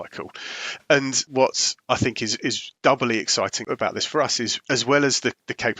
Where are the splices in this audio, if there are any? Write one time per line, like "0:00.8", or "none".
0:01.2
0:02.7
0:03.6
0:04.6